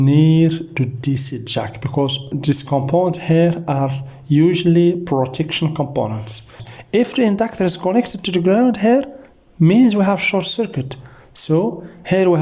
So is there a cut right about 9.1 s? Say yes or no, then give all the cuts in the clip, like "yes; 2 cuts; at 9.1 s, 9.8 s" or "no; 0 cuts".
no; 2 cuts; at 2.3 s, 6.6 s